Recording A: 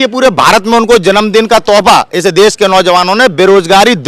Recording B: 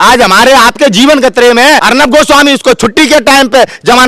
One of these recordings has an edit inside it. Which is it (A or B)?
B